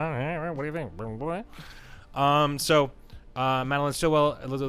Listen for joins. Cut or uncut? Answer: uncut